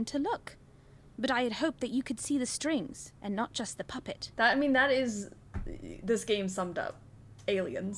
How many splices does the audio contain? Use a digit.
1